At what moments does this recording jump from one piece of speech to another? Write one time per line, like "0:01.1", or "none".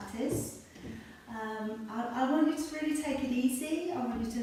none